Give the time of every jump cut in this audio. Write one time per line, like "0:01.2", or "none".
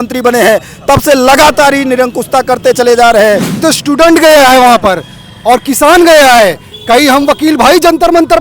0:03.6